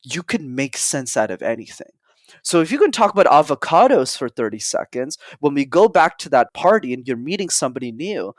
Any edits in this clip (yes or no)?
yes